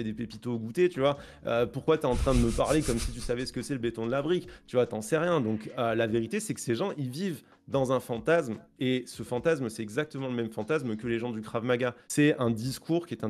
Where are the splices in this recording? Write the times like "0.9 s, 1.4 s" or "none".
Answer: none